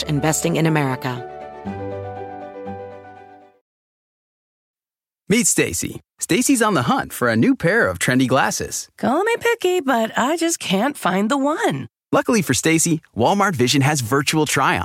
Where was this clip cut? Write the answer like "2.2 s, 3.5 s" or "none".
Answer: 1.2 s